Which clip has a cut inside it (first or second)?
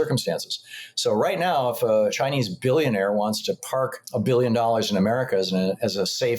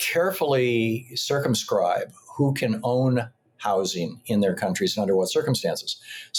first